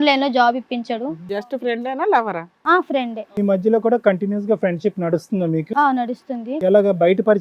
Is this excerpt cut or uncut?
cut